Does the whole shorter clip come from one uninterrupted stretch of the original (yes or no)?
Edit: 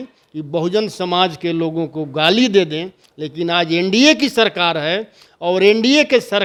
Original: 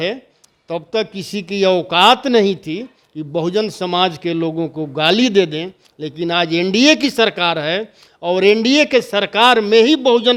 yes